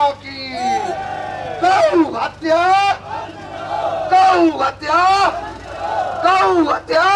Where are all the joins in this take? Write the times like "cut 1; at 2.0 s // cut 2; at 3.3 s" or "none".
none